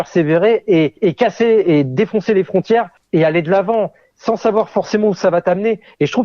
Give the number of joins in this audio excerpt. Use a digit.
2